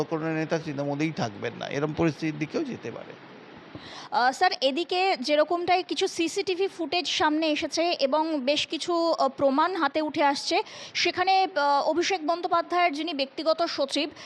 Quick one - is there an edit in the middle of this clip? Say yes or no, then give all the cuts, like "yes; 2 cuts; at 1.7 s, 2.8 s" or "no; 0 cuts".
no; 0 cuts